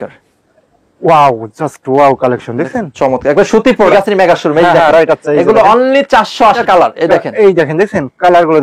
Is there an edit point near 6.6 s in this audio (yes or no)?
yes